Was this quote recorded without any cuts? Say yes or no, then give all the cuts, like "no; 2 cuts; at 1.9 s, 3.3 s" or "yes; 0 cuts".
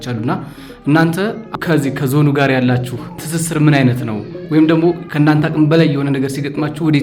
yes; 0 cuts